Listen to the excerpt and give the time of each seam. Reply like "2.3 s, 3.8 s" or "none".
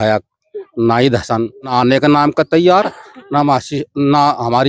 1.7 s